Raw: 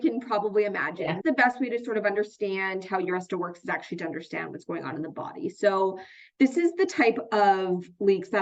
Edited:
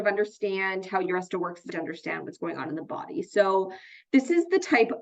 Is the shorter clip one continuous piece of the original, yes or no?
no